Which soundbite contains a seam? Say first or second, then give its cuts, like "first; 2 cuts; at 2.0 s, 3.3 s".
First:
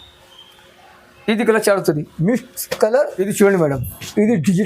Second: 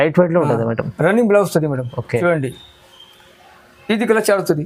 first; 1 cut; at 3.2 s